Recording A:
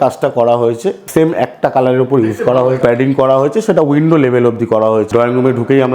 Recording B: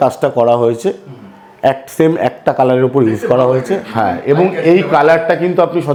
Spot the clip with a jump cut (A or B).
A